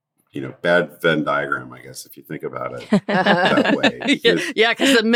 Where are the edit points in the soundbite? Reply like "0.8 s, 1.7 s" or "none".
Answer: none